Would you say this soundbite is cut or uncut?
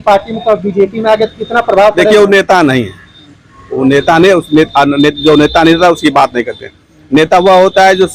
uncut